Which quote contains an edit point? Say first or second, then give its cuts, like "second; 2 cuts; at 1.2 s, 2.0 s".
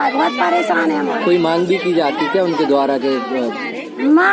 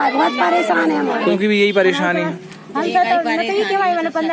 second; 1 cut; at 1.3 s